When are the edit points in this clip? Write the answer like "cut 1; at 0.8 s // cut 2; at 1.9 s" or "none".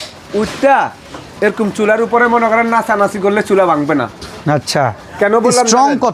none